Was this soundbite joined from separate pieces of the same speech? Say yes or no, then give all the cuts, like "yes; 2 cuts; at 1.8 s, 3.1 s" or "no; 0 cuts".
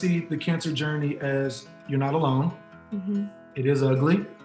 no; 0 cuts